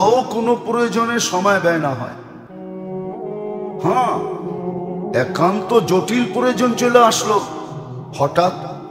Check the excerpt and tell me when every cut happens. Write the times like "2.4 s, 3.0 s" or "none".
none

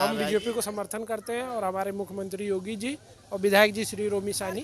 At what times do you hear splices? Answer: none

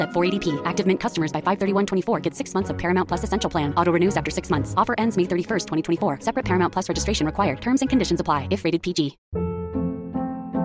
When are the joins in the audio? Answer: 9.2 s

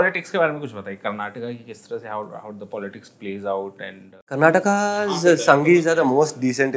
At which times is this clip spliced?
none

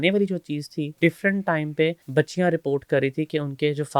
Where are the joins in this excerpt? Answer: 0.9 s, 2.0 s

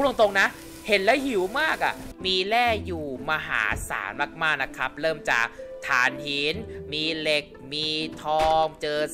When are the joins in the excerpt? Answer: 2.1 s

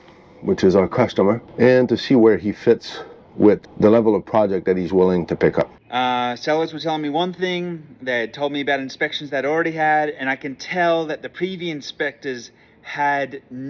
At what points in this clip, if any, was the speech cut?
1.5 s, 3.7 s, 5.8 s

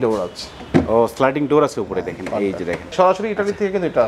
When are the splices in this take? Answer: 2.9 s

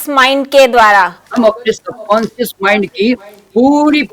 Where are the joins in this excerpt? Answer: 1.2 s

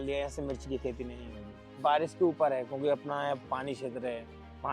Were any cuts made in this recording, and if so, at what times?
1.8 s

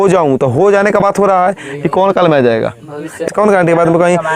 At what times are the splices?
3.3 s

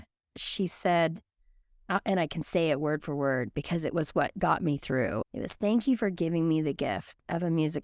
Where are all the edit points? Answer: 5.3 s

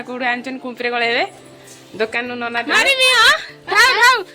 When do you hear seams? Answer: 2.7 s

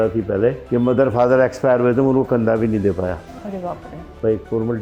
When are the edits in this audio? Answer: none

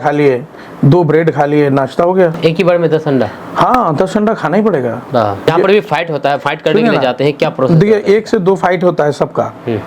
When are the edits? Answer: 5.4 s

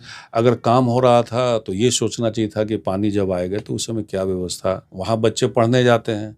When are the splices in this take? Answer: 4.9 s

